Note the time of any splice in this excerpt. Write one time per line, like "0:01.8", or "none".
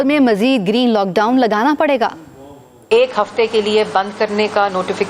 0:02.7